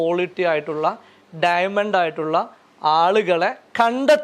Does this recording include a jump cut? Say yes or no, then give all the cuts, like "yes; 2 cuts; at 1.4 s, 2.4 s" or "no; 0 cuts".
no; 0 cuts